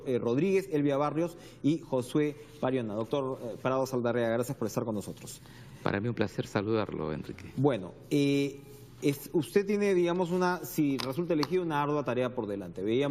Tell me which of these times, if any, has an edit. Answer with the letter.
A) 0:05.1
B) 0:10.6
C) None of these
B